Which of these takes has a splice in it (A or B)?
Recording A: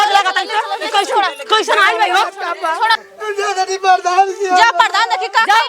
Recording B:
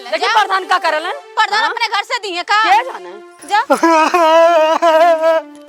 A